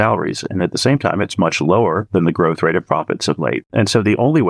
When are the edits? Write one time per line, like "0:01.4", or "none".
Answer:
0:02.0
0:03.7

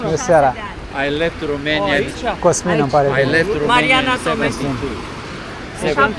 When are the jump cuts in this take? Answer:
none

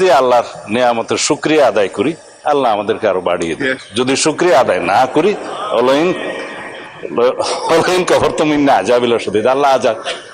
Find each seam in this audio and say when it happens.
none

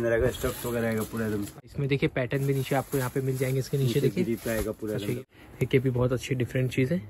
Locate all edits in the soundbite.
0:01.6
0:05.2

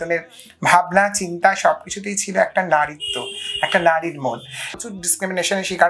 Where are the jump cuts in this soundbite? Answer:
0:04.7

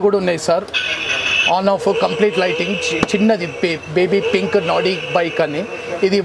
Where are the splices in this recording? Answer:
none

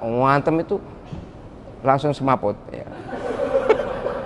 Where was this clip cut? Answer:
none

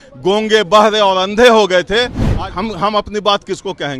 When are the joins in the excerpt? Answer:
0:02.2

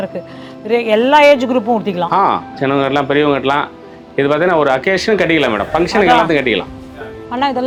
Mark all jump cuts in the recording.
none

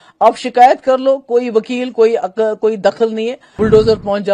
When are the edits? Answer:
0:03.4

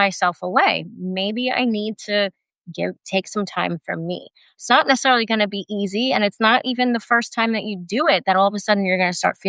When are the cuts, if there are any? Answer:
0:04.6

